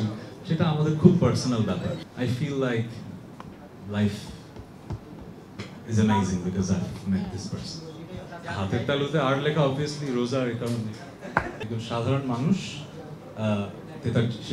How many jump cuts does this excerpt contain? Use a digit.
3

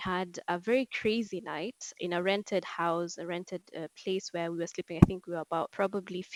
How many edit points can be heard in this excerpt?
0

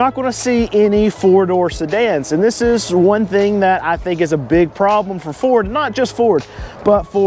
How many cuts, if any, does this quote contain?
0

